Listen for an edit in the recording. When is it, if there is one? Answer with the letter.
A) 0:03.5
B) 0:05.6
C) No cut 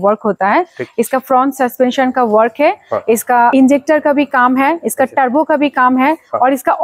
A